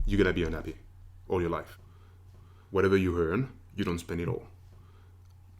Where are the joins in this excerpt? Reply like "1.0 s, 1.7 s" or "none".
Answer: 2.2 s